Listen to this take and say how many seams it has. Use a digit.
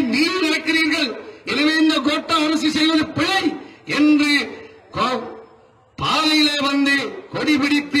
0